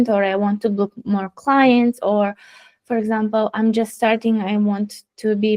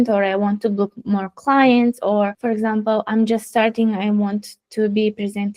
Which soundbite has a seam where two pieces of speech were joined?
second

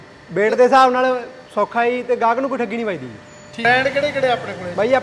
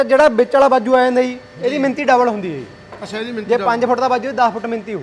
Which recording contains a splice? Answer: first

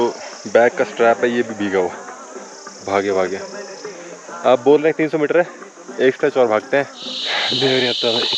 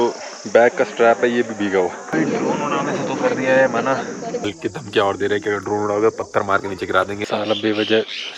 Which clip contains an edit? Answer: second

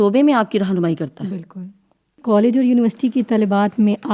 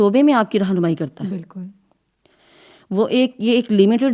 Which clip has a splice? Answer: first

